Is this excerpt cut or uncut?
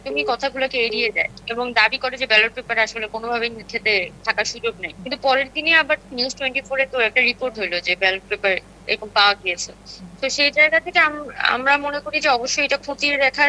uncut